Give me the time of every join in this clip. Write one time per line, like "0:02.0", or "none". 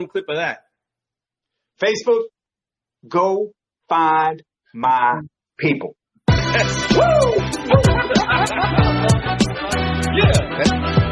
0:08.7